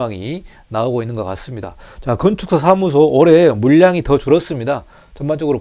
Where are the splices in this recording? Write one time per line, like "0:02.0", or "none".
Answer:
none